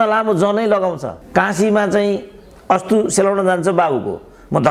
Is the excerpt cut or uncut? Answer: cut